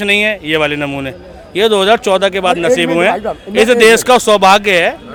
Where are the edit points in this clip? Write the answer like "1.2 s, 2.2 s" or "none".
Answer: none